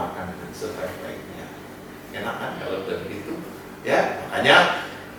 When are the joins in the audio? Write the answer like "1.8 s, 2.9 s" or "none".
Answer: none

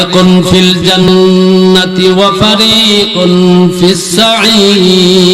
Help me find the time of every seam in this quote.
1.0 s

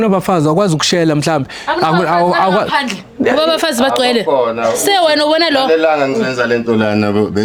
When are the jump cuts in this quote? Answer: none

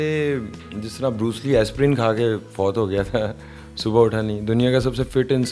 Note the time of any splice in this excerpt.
none

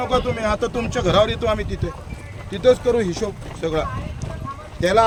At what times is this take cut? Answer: none

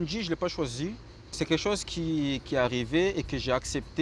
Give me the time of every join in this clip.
1.3 s

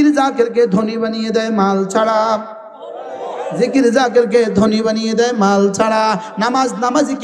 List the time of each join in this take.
none

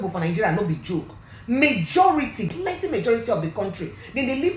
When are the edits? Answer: 2.5 s

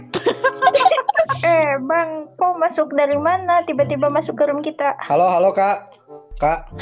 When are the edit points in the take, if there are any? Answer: 1.3 s, 5.0 s

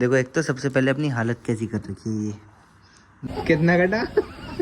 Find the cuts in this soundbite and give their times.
3.2 s

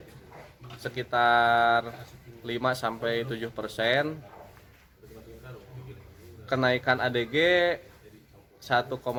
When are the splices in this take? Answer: none

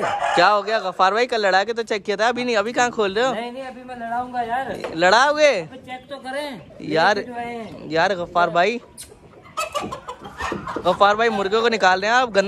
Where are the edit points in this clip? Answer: none

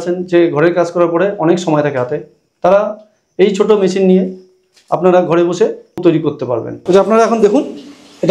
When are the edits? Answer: 6.3 s

